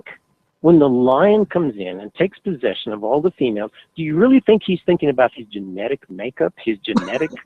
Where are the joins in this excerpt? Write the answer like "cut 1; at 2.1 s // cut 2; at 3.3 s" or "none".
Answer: cut 1; at 6.0 s